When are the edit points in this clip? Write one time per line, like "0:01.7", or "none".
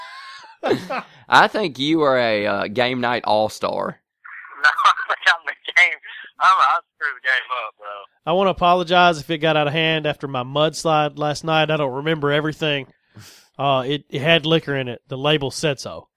none